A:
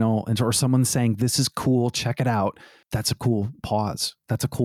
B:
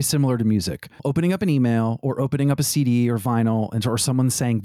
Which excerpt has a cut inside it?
B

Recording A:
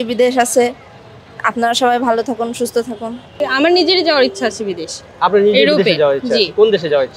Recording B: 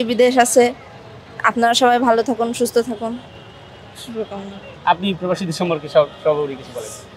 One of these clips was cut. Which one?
A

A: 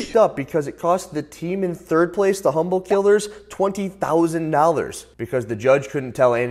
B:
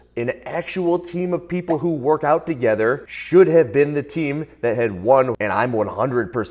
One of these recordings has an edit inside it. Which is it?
B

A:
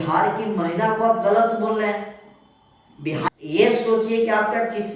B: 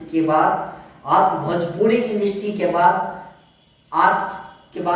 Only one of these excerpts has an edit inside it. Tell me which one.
A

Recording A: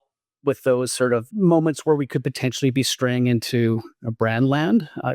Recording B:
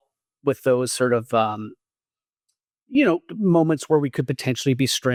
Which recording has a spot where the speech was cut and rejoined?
A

